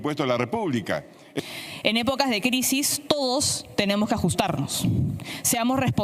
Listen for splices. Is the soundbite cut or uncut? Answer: cut